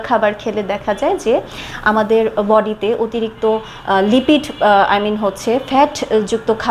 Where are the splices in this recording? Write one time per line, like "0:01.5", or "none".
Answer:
none